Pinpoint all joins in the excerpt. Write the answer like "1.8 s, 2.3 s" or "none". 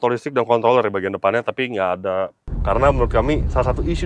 2.4 s

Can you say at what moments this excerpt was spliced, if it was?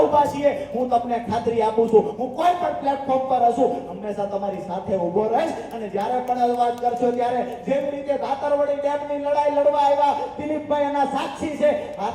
none

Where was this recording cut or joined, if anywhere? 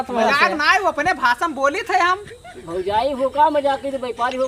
none

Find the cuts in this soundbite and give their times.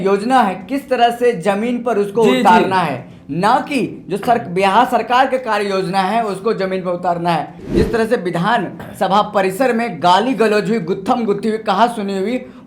7.6 s

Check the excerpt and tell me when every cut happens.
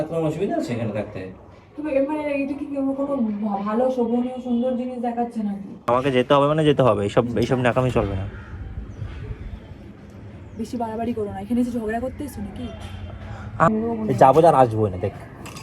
5.8 s, 13.7 s

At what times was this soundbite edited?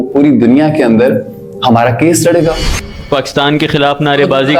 2.9 s

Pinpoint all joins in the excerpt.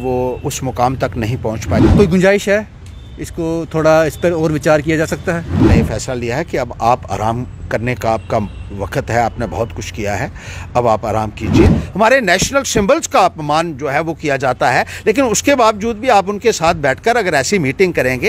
1.8 s, 5.7 s, 11.7 s

